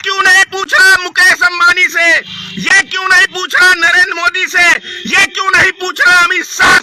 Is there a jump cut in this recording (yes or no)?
no